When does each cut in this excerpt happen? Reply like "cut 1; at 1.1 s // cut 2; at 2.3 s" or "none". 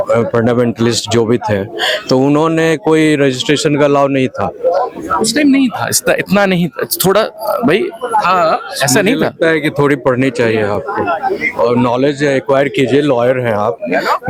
none